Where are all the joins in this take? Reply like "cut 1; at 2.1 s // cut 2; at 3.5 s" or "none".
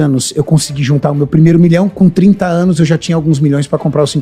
none